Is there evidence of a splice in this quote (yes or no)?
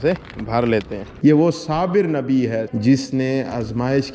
yes